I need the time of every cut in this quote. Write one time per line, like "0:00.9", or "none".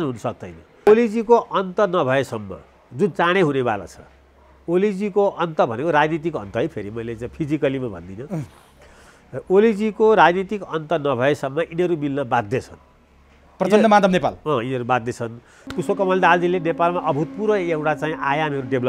0:00.9
0:15.6